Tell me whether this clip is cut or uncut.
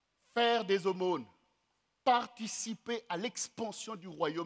uncut